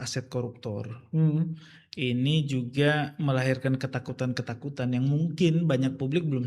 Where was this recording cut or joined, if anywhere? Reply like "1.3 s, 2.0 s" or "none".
none